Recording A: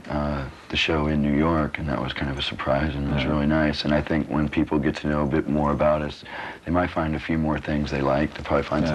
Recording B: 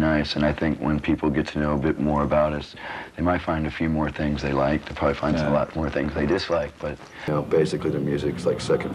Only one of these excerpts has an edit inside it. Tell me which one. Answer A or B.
B